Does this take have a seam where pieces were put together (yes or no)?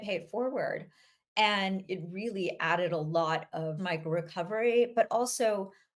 no